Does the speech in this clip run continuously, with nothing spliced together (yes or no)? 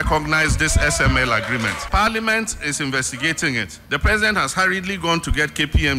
yes